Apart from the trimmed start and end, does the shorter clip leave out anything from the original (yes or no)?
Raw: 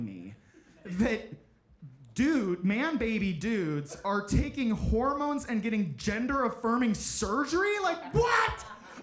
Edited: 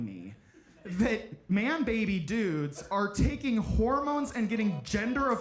yes